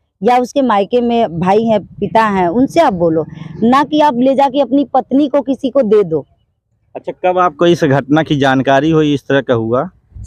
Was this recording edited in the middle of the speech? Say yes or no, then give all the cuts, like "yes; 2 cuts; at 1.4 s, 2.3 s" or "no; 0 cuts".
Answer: no; 0 cuts